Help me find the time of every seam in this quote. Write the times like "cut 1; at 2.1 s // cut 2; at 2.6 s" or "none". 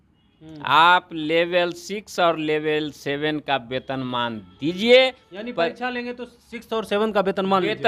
none